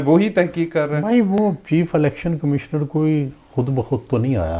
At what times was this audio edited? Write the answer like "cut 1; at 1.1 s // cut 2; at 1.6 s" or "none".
none